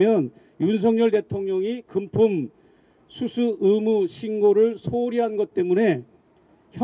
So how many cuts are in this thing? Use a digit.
0